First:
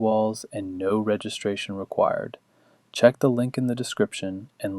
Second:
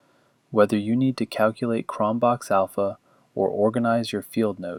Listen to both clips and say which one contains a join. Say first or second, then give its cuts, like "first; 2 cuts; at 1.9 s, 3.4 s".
first; 1 cut; at 3.2 s